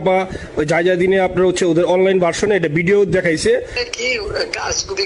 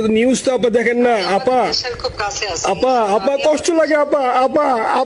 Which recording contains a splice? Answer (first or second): first